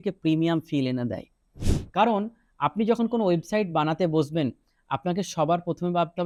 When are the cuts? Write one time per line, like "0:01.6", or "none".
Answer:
none